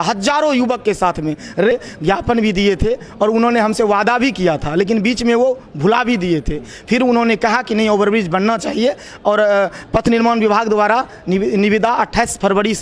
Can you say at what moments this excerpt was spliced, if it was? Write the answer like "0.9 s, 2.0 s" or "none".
1.7 s